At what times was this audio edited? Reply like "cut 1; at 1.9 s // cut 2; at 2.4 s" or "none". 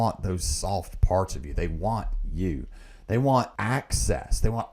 cut 1; at 3.5 s

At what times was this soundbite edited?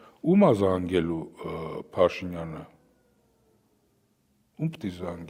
none

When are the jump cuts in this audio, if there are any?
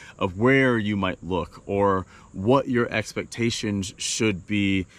none

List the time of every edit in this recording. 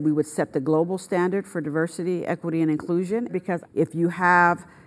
cut 1; at 3.3 s

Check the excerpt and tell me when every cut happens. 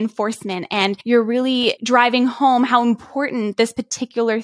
cut 1; at 1.0 s // cut 2; at 1.8 s

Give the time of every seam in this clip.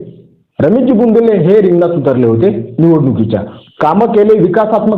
cut 1; at 3.5 s

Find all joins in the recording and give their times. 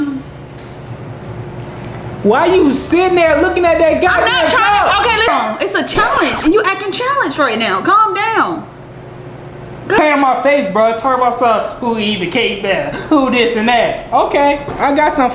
cut 1; at 5.3 s // cut 2; at 10.0 s

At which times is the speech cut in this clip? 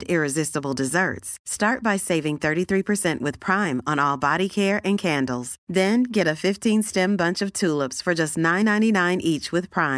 none

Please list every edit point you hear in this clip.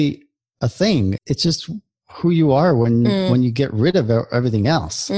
cut 1; at 1.2 s

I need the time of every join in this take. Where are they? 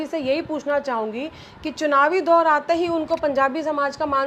none

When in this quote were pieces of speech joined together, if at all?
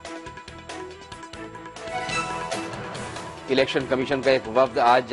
cut 1; at 1.8 s // cut 2; at 3.3 s

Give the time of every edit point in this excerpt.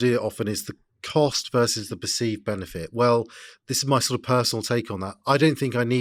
none

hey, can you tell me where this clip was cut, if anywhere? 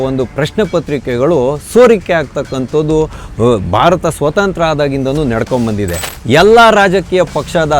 cut 1; at 6.1 s

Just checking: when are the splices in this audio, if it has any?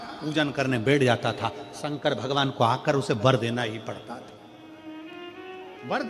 none

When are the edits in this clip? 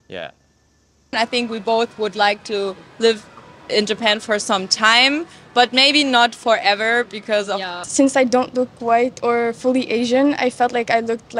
cut 1; at 1.1 s // cut 2; at 7.8 s

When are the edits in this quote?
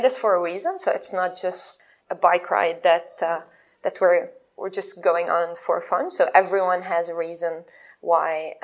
cut 1; at 1.7 s

